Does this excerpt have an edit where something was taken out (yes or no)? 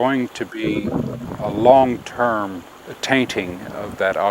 yes